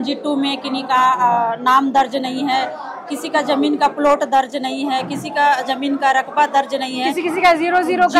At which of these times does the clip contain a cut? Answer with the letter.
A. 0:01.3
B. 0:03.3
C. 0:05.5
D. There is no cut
D